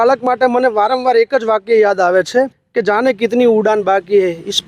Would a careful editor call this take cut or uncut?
cut